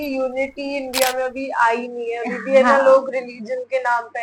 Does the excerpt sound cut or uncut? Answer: uncut